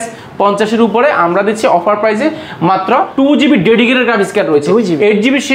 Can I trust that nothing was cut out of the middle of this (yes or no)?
no